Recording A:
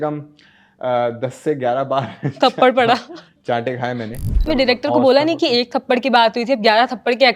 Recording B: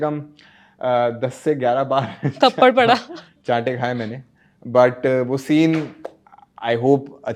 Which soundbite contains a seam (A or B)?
A